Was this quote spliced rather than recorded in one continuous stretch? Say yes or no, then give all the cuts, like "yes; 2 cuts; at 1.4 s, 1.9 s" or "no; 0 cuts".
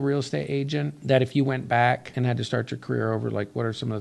yes; 2 cuts; at 0.9 s, 2.1 s